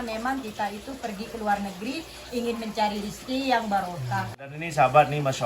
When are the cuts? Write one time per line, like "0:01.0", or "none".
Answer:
0:04.5